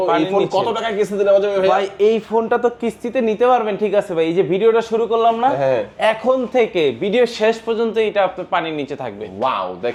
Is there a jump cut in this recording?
no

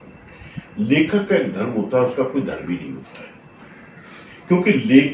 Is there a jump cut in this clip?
no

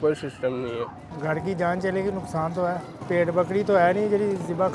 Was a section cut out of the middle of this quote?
no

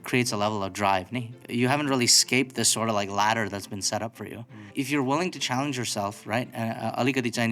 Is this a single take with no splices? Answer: no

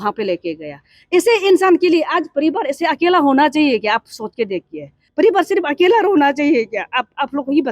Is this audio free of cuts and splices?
no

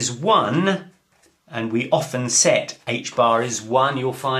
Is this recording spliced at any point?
yes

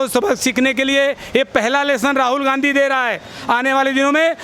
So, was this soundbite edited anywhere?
no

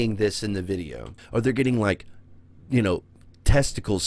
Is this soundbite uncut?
no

